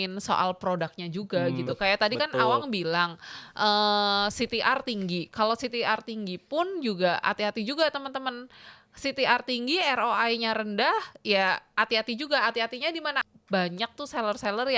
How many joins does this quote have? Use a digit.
1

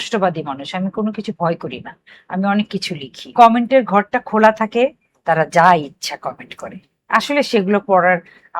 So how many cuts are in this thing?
1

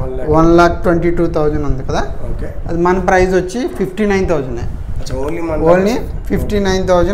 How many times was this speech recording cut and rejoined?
0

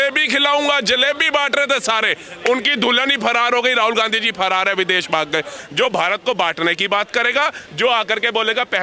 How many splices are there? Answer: 1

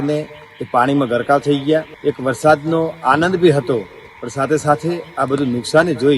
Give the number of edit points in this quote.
1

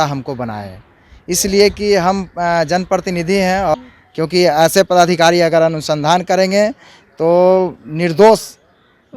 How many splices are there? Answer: 1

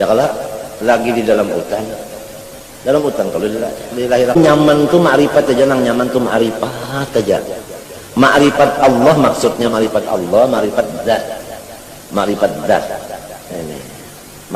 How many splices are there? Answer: 1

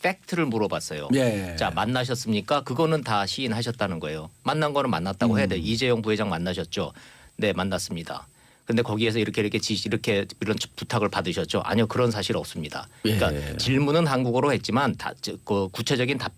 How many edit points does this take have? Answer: 1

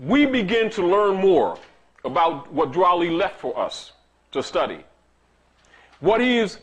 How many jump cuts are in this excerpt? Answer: 1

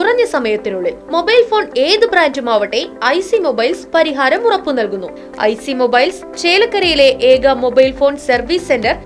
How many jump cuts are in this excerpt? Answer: 1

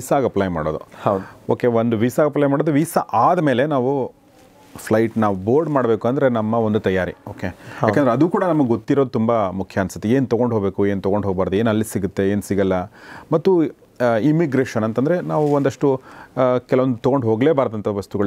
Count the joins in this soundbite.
0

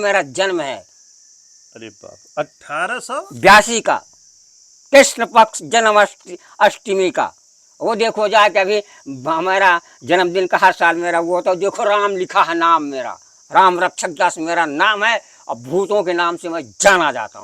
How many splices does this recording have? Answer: 0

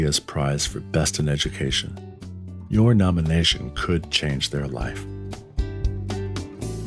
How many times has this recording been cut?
1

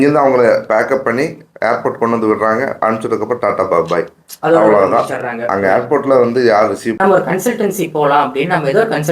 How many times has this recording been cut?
1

